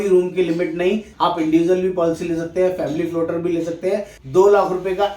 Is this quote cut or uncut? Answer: cut